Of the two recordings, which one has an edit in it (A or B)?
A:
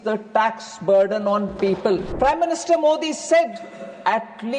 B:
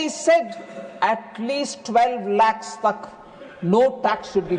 A